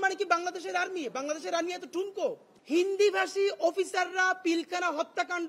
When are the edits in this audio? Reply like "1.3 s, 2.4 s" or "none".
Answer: 2.5 s